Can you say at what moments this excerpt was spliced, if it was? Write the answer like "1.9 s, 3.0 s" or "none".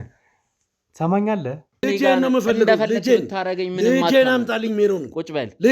1.8 s